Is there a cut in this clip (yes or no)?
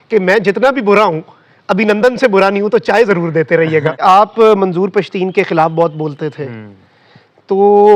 yes